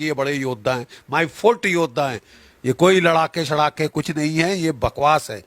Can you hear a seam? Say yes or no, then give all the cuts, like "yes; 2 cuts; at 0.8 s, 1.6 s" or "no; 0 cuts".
yes; 1 cut; at 2.2 s